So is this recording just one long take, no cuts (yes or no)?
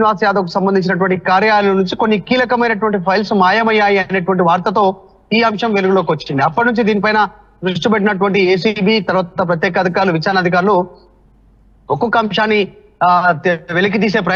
yes